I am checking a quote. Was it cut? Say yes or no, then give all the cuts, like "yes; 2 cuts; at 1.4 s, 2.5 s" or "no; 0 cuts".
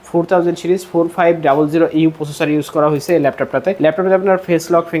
yes; 1 cut; at 3.8 s